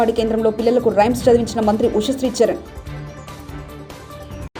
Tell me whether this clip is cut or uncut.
uncut